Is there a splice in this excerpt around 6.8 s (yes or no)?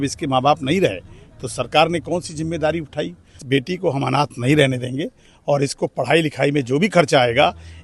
no